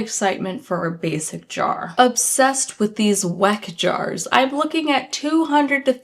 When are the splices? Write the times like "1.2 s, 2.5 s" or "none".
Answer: 1.9 s